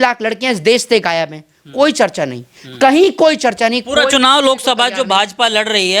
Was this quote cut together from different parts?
no; 0 cuts

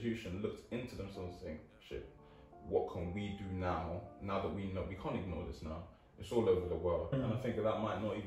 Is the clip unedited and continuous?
no; 1 cut; at 7.1 s

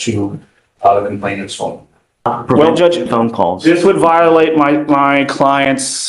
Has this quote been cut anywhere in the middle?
yes; 1 cut; at 2.3 s

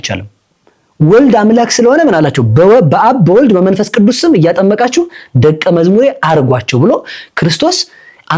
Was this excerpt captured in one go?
yes; 0 cuts

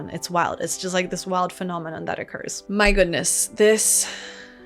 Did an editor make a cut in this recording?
yes; 1 cut; at 2.5 s

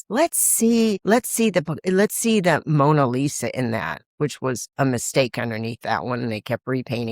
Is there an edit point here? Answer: yes; 1 cut; at 1.0 s

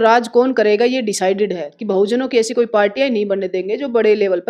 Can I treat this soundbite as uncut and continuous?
yes; 0 cuts

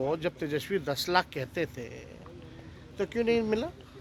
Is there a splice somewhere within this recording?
no; 0 cuts

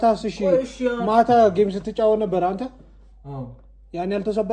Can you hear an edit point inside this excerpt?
no; 0 cuts

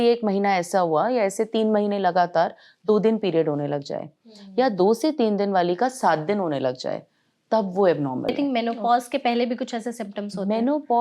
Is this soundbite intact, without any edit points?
no; 1 cut; at 8.3 s

